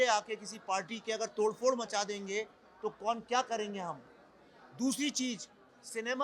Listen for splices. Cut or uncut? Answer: uncut